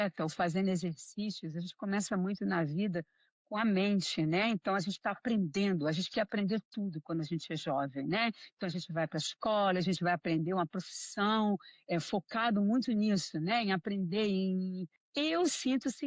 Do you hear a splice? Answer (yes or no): no